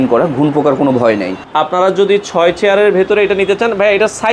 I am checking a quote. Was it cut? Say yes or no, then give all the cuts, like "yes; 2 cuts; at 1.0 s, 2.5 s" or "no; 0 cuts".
yes; 1 cut; at 1.4 s